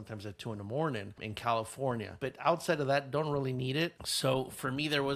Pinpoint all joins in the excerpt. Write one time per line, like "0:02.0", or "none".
0:01.3